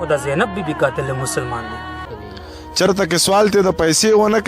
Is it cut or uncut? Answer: cut